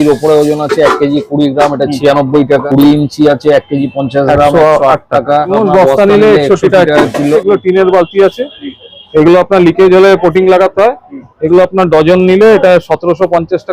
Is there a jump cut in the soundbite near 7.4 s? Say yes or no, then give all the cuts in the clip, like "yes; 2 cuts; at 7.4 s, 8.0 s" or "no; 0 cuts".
yes; 3 cuts; at 2.6 s, 5.5 s, 7.4 s